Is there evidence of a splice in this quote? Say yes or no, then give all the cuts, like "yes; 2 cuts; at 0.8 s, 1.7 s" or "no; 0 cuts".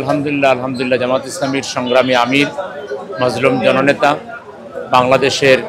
no; 0 cuts